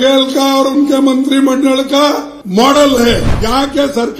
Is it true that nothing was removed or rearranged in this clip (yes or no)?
no